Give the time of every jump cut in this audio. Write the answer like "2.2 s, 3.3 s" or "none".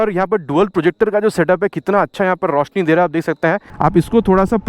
3.7 s